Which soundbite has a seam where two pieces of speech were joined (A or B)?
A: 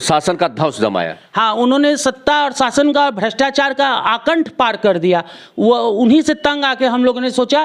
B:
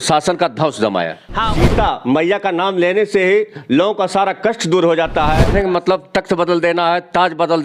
B